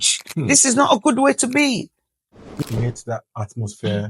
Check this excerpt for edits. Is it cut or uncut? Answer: cut